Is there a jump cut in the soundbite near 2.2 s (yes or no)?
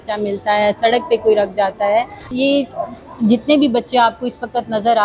yes